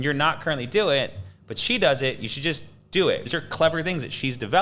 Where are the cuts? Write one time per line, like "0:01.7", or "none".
0:03.3